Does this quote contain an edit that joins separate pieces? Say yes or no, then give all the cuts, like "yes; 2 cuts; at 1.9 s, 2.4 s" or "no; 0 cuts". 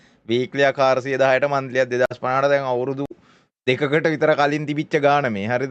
no; 0 cuts